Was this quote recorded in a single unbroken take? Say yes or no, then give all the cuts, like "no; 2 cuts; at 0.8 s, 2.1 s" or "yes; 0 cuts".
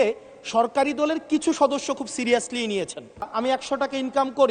no; 1 cut; at 3.3 s